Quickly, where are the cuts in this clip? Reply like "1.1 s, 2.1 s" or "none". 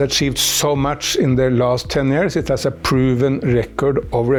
none